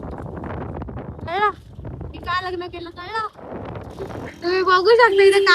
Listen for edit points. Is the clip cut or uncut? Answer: cut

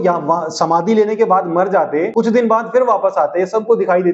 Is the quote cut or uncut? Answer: cut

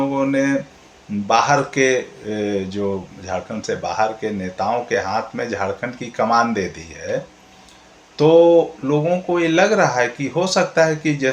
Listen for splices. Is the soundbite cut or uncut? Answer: uncut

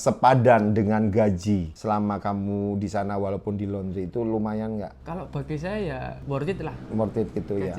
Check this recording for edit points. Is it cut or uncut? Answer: cut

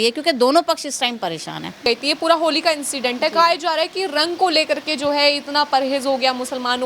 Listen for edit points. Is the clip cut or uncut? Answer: cut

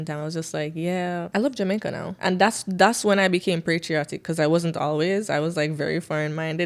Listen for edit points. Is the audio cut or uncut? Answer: cut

